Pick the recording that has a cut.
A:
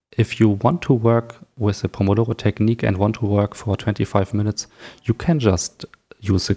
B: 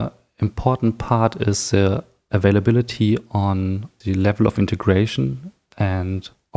B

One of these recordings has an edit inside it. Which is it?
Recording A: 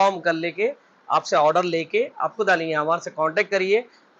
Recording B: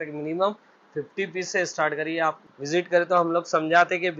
B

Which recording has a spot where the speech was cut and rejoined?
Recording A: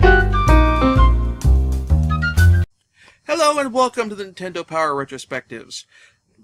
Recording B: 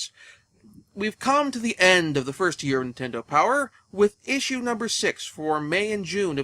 B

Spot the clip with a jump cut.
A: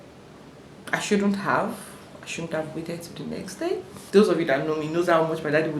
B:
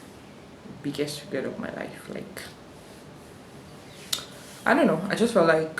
A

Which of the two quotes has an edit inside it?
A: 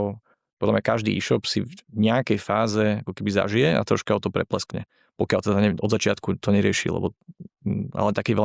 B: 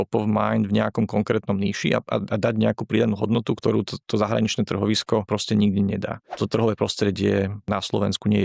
B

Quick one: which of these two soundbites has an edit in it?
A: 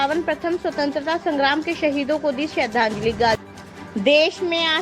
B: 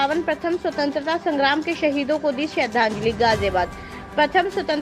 A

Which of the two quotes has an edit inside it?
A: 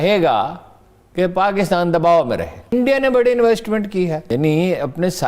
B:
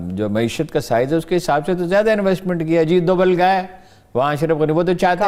A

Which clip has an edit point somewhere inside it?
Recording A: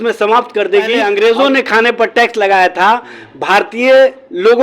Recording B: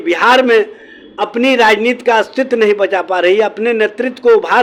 A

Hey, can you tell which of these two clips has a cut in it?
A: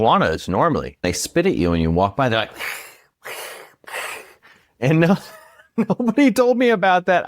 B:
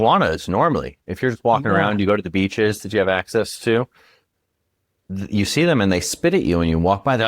A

